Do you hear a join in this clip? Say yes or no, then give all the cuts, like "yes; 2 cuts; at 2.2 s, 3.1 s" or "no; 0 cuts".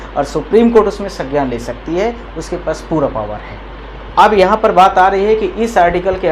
no; 0 cuts